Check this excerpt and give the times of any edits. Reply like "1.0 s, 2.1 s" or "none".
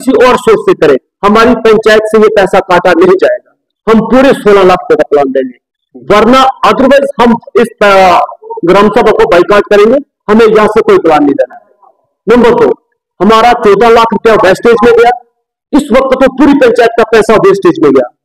none